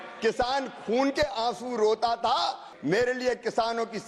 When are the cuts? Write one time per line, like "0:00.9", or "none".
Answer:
0:02.7